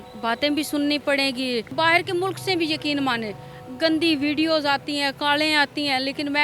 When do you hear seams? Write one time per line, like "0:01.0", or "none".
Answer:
0:01.7